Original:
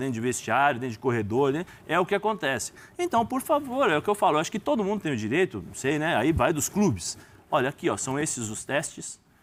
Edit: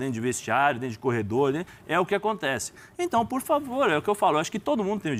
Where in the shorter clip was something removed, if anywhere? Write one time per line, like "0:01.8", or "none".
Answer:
none